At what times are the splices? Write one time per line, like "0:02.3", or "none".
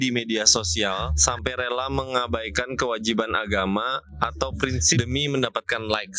0:01.1
0:05.0